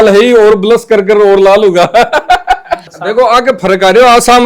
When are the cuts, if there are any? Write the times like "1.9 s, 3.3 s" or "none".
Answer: 2.8 s